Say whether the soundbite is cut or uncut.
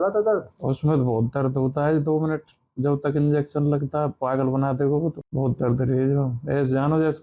cut